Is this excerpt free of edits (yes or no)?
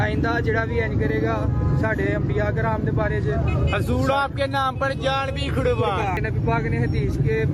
no